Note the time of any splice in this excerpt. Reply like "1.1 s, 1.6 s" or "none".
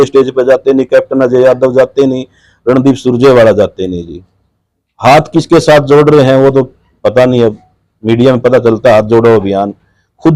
none

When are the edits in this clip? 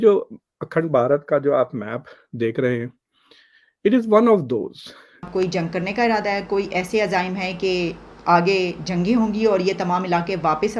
5.3 s

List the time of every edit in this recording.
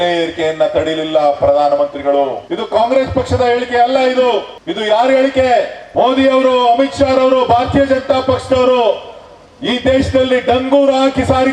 2.4 s, 4.6 s, 5.8 s

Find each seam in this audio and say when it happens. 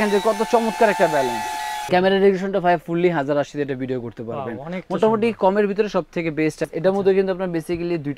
1.7 s, 6.7 s

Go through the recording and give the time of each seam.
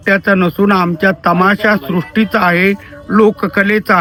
none

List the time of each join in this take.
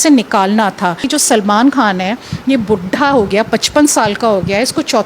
1.1 s

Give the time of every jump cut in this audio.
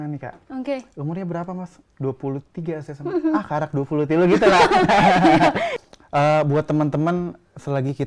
5.7 s

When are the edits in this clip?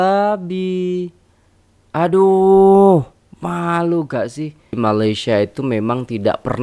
4.8 s

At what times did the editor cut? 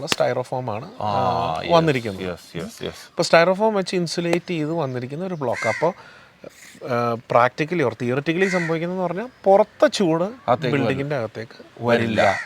none

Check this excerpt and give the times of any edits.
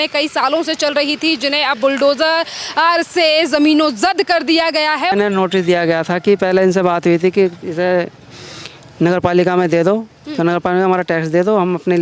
5.1 s

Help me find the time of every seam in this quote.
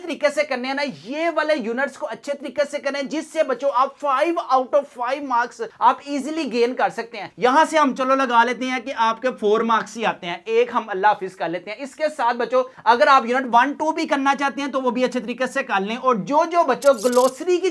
none

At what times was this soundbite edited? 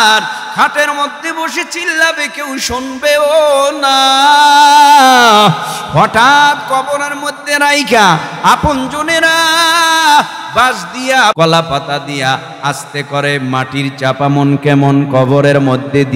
11.3 s

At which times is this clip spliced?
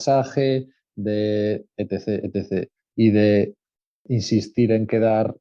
4.0 s

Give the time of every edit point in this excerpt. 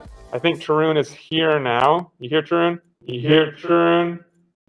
none

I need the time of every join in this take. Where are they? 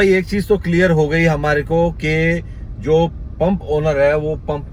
none

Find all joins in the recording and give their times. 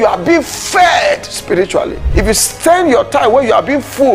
2.0 s

